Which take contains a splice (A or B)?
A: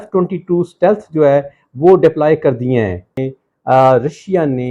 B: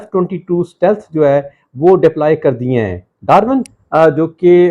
A